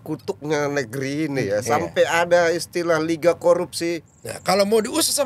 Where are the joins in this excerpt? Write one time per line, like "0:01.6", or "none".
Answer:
0:04.1